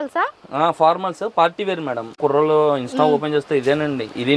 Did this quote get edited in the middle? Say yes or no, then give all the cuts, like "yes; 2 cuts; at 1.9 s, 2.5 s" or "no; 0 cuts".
yes; 1 cut; at 2.2 s